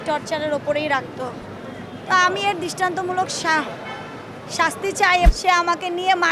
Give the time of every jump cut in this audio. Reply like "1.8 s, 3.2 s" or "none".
5.3 s